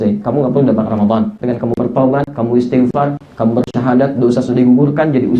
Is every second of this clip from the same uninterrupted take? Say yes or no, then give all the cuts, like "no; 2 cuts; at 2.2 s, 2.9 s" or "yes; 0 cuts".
no; 1 cut; at 1.4 s